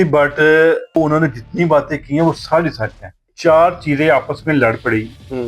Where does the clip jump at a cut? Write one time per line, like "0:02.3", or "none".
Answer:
0:01.0
0:03.3